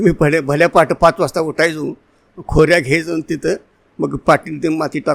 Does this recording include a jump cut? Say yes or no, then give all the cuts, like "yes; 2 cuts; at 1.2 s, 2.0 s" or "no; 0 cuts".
no; 0 cuts